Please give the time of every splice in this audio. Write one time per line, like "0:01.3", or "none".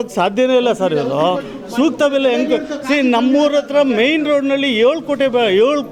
none